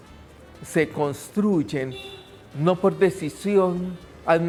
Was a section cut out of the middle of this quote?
no; 0 cuts

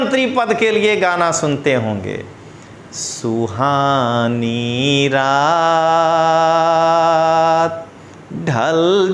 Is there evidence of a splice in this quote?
no; 0 cuts

